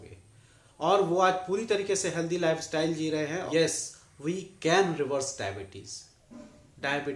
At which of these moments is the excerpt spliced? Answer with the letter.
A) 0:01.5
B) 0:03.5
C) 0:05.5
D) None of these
B